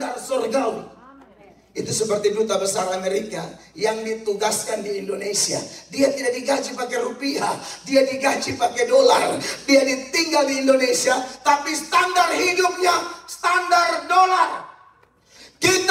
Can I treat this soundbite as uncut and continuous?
yes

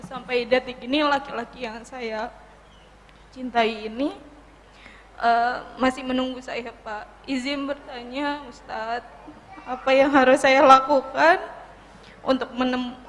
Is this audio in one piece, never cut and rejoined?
yes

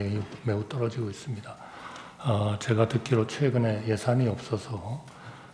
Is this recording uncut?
yes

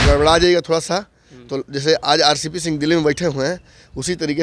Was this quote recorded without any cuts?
yes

